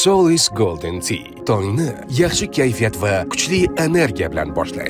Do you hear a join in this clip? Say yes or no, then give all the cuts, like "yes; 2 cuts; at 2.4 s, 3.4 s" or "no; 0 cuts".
no; 0 cuts